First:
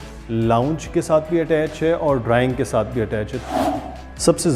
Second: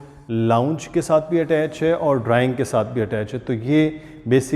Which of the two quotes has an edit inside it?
first; 1 cut; at 3.6 s

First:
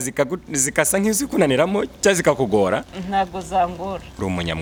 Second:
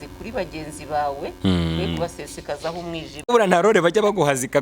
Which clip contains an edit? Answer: second; 1 cut; at 3.3 s

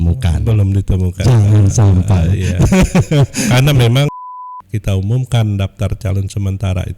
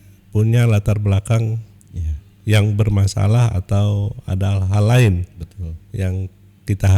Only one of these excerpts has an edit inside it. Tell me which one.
first; 1 cut; at 4.1 s

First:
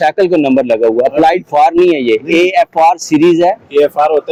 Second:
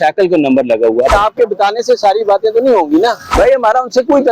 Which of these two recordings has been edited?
second; 2 cuts; at 1.1 s, 3.2 s

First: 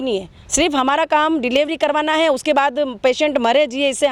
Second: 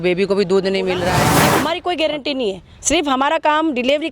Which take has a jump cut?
second; 1 cut; at 1.4 s

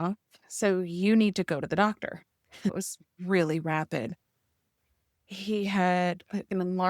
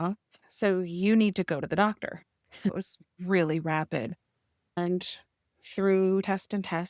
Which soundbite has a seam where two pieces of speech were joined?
second; 1 cut; at 4.6 s

